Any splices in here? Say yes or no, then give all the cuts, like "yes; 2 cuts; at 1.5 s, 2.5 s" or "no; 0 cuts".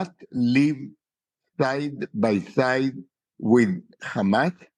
no; 0 cuts